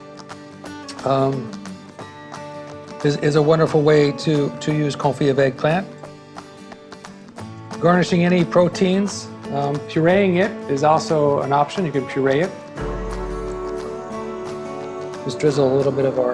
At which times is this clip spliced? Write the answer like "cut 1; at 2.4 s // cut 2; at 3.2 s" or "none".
cut 1; at 12.6 s // cut 2; at 15.3 s